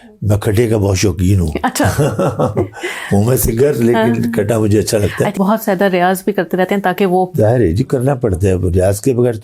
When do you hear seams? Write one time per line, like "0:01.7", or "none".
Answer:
0:05.3